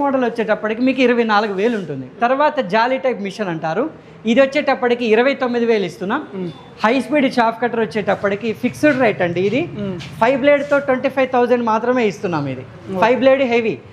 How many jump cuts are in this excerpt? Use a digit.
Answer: 1